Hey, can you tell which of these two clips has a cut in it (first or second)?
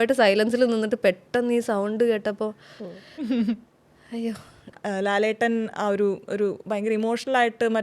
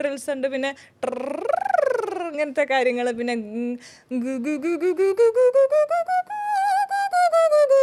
first